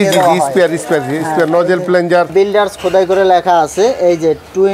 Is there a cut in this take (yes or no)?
yes